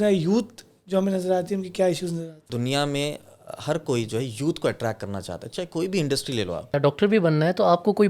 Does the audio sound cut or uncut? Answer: cut